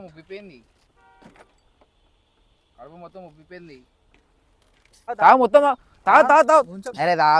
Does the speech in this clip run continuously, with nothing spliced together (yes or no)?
no